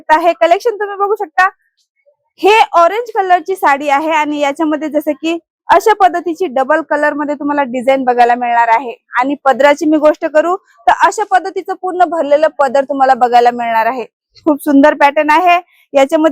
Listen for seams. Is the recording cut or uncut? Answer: uncut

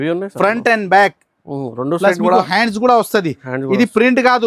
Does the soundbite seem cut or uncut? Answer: uncut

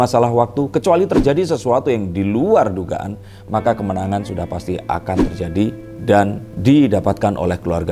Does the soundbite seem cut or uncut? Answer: uncut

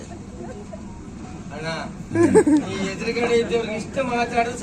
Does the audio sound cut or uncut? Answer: uncut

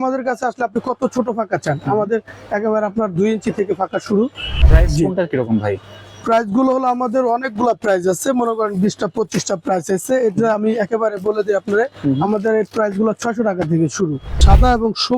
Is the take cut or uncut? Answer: cut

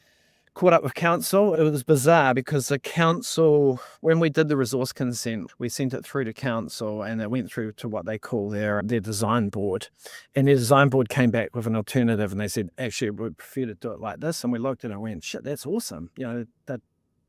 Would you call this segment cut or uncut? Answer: cut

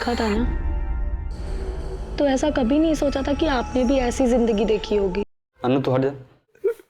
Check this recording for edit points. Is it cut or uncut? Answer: cut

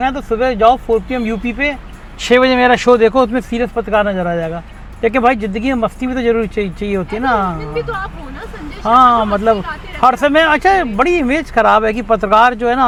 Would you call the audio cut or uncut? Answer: uncut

